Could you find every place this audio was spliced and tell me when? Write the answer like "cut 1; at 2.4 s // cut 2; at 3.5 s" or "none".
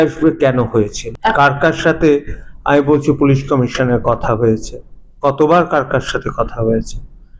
cut 1; at 1.0 s